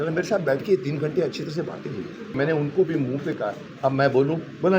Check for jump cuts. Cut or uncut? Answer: cut